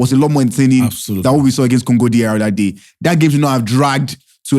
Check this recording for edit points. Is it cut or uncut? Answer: uncut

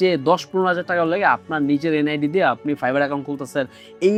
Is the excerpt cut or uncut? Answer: uncut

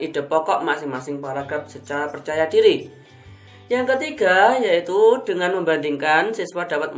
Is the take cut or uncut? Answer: uncut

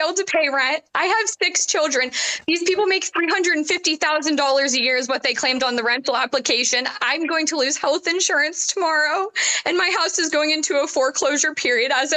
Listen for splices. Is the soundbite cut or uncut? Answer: uncut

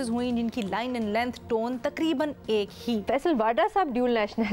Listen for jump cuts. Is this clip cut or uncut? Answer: cut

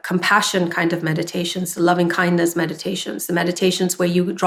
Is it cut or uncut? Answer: uncut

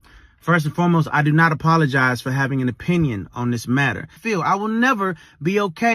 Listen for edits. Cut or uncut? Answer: cut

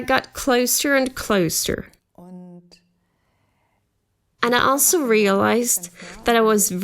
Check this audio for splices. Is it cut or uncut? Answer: cut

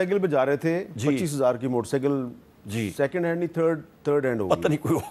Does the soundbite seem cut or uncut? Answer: uncut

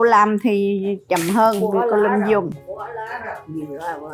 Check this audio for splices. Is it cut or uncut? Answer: uncut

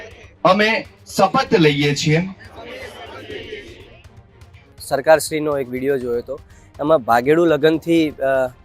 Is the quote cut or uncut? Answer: cut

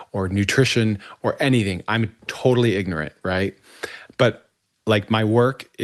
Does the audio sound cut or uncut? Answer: uncut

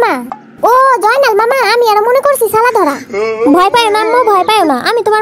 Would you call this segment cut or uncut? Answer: uncut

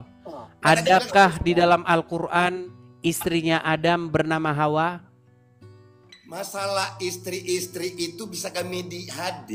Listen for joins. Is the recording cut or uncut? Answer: uncut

